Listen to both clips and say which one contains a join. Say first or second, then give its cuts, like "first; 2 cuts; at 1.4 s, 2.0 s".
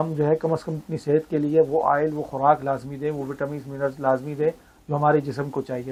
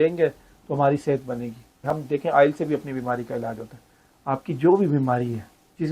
second; 1 cut; at 1.9 s